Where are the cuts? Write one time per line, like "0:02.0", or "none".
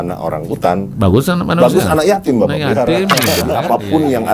0:03.4